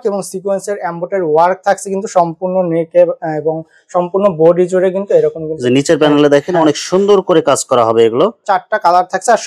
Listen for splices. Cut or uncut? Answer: cut